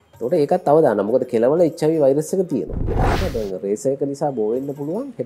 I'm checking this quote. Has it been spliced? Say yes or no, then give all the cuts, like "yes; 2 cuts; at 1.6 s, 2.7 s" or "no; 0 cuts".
yes; 1 cut; at 3.2 s